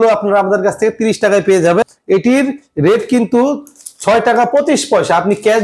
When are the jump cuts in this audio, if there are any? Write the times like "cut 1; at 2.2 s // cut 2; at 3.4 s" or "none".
cut 1; at 1.8 s